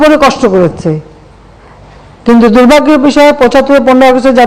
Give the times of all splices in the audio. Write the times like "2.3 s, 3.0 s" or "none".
none

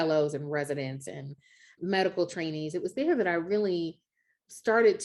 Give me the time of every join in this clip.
1.7 s

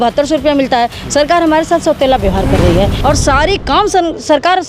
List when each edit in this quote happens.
2.9 s

